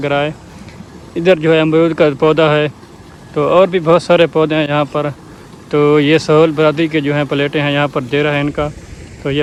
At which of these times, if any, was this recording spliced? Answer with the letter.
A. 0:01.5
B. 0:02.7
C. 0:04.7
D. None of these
D